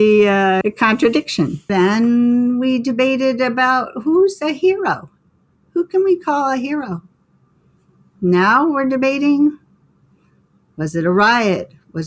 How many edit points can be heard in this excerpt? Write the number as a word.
zero